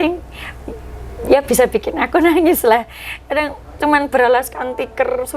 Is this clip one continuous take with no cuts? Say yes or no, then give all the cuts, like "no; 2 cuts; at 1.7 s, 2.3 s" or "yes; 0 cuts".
yes; 0 cuts